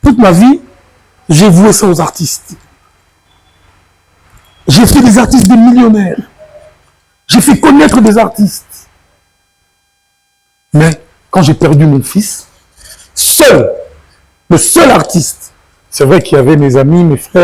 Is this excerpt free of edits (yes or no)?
yes